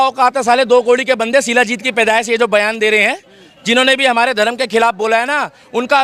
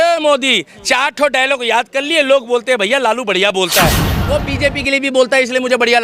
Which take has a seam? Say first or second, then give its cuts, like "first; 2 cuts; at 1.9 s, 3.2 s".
second; 1 cut; at 4.0 s